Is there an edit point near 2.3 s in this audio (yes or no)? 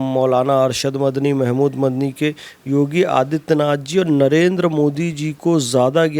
no